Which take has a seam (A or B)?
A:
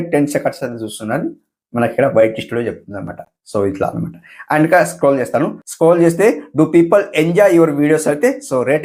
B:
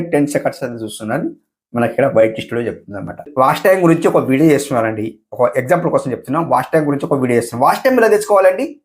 B